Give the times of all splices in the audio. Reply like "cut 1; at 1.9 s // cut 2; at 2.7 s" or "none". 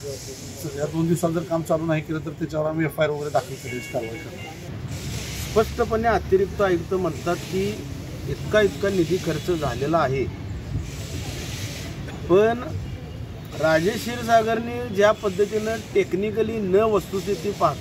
cut 1; at 4.7 s